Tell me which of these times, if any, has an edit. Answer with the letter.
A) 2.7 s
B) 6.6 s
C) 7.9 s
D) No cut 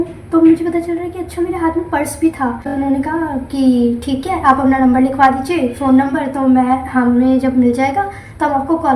A